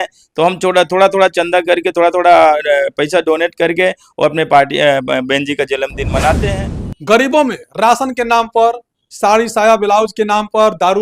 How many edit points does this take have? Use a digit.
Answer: 1